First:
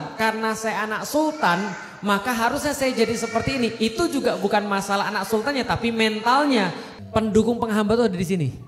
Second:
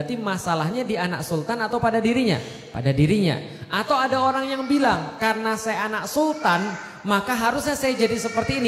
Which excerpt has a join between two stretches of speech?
first; 1 cut; at 6.8 s

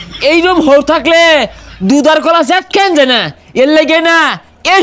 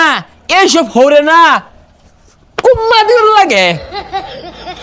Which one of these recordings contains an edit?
second; 1 cut; at 3.8 s

